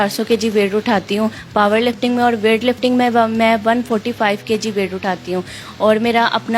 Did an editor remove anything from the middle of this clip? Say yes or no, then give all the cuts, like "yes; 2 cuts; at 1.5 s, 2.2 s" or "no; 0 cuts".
no; 0 cuts